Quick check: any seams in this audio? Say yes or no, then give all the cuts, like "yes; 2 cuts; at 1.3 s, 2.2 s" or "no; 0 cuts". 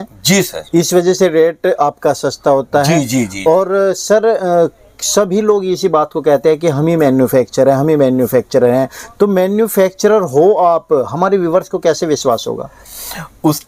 no; 0 cuts